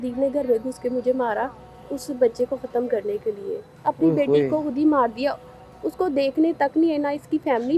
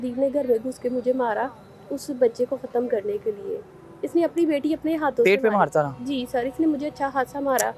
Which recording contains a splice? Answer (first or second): first